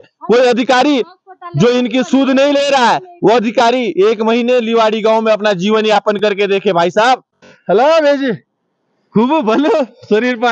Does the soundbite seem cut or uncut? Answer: cut